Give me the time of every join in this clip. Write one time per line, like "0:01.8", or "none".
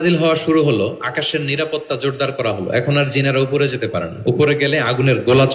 none